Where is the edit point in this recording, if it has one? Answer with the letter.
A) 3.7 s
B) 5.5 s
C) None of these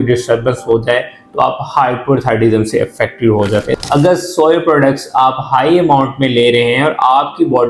A